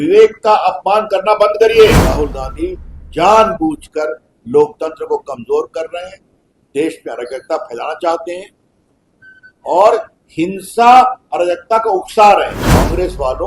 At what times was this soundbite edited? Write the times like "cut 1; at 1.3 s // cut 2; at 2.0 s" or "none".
cut 1; at 2.0 s // cut 2; at 12.6 s